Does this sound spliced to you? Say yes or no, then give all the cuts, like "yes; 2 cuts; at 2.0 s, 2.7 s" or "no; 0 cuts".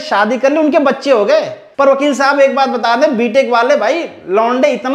yes; 1 cut; at 1.6 s